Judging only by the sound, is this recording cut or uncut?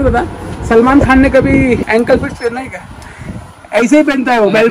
cut